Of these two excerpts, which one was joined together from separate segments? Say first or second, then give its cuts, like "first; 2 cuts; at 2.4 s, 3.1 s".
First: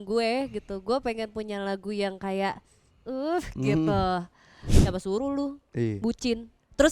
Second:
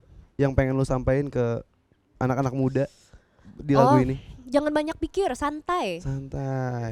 first; 1 cut; at 4.6 s